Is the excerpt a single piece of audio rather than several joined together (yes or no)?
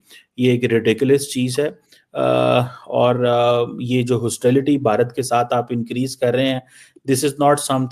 yes